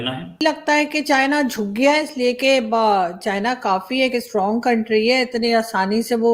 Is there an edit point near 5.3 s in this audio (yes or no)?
no